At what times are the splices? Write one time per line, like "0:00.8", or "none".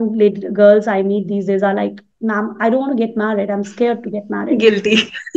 none